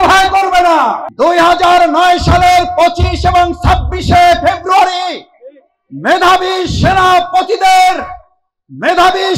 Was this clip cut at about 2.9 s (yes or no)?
no